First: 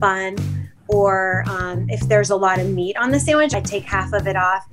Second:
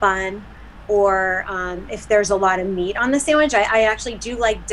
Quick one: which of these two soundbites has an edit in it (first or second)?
first